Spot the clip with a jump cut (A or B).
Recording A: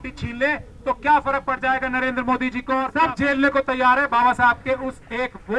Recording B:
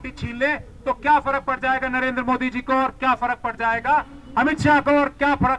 A